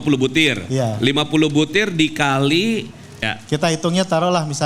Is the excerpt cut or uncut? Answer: cut